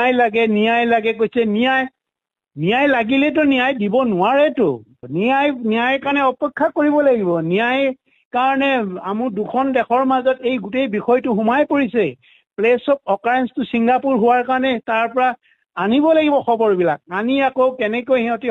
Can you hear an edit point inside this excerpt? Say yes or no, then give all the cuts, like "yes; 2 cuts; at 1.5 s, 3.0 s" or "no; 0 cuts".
no; 0 cuts